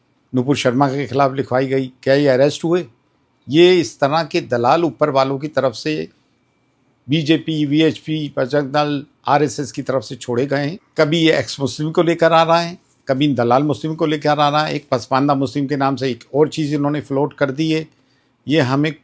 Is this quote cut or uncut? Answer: cut